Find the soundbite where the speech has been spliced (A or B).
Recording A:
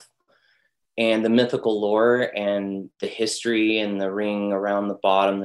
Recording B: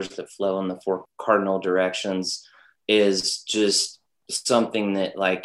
B